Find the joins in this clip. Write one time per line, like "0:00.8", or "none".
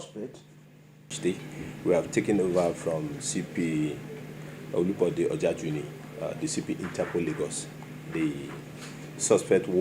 0:01.1